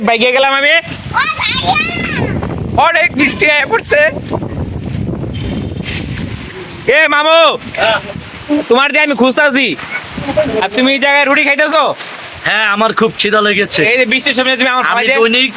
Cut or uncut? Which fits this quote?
uncut